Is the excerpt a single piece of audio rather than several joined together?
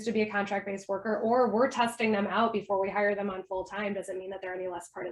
yes; 0 cuts

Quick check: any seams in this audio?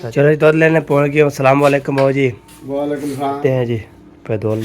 yes; 1 cut; at 3.4 s

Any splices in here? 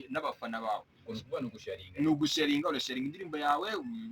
yes; 1 cut; at 3.2 s

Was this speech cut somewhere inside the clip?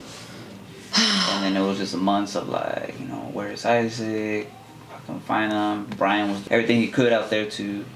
yes; 1 cut; at 6.4 s

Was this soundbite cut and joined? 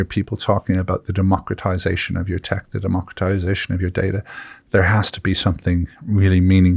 no; 0 cuts

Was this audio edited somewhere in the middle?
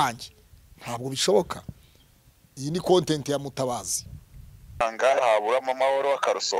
yes; 1 cut; at 4.8 s

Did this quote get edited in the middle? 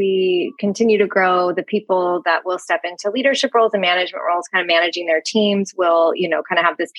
no; 0 cuts

